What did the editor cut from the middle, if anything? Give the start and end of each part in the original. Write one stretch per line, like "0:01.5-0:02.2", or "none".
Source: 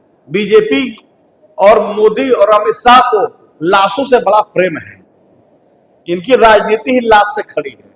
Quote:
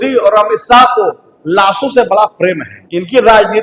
0:04.9-0:05.9